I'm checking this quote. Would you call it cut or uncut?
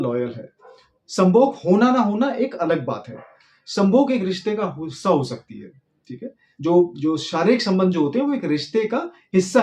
uncut